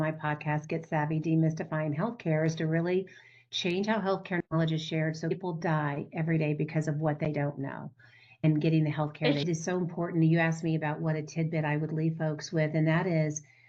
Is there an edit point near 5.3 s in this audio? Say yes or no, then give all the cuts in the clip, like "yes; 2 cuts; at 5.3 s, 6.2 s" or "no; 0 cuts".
yes; 2 cuts; at 5.3 s, 9.4 s